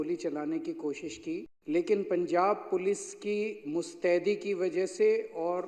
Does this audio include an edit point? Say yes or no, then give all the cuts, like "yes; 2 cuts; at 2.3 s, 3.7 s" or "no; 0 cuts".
yes; 1 cut; at 1.5 s